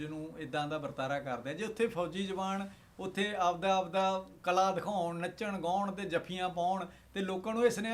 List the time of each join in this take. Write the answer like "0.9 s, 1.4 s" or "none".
none

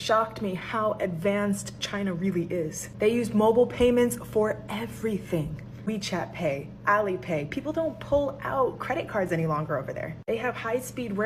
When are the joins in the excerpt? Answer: none

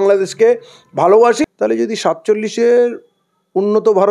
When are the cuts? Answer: 1.4 s

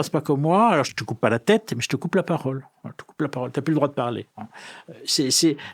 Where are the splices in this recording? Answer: 0.9 s

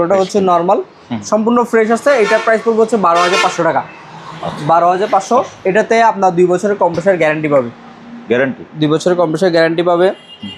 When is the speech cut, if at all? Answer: none

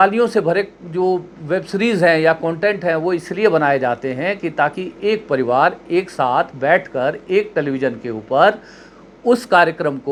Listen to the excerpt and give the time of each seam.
none

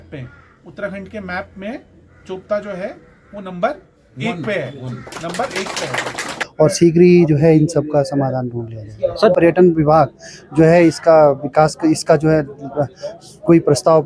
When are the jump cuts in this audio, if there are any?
6.4 s, 9.3 s

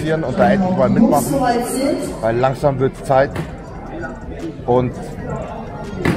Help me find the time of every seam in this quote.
none

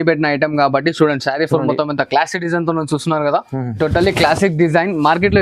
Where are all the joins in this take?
3.8 s

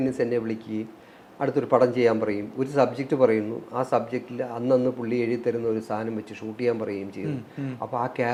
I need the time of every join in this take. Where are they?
none

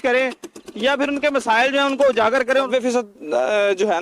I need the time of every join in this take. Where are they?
2.7 s

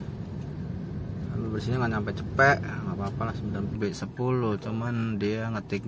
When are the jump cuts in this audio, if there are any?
3.7 s

